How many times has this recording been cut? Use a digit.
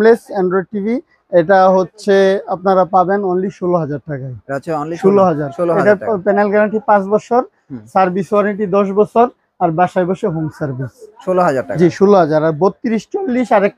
0